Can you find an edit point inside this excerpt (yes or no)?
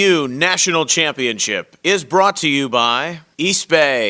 yes